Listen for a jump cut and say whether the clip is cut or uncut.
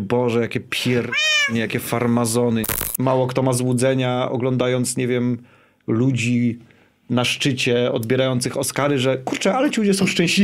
cut